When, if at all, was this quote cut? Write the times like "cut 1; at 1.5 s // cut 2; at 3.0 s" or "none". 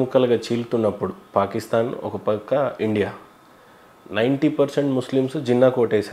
none